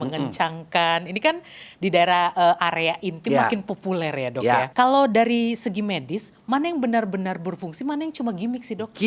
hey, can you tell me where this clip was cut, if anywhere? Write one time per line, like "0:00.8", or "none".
0:04.7